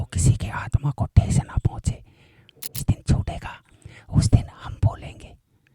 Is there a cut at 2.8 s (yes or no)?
yes